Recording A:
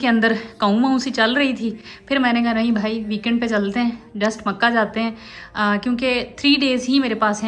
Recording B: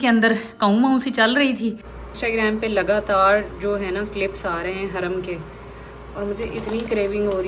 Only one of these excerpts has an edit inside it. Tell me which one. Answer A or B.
B